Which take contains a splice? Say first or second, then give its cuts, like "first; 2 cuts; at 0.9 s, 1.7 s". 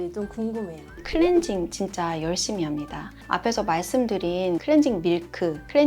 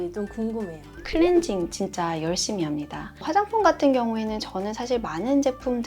second; 1 cut; at 3.2 s